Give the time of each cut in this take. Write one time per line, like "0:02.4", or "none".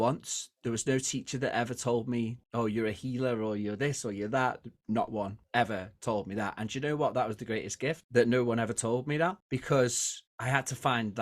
none